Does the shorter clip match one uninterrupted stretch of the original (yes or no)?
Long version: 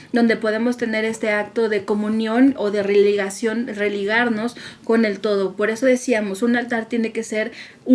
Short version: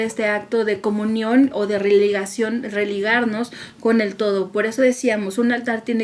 yes